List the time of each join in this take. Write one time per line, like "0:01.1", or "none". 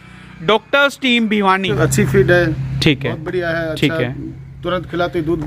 0:01.7